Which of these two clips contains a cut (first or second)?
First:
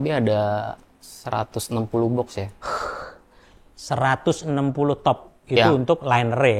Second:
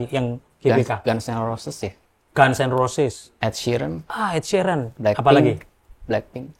second